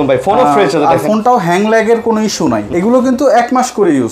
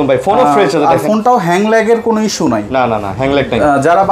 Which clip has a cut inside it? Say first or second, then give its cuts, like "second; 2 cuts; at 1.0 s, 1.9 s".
first; 1 cut; at 2.6 s